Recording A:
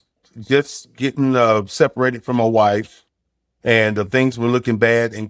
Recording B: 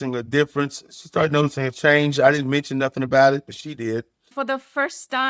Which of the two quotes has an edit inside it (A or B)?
B